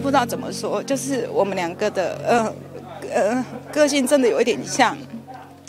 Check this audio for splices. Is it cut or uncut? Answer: uncut